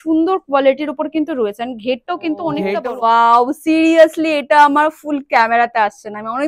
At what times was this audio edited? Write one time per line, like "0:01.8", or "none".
0:02.7